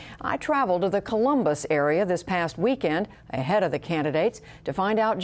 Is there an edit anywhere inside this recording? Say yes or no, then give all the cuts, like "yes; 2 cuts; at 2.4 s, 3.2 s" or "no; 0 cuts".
yes; 1 cut; at 4.3 s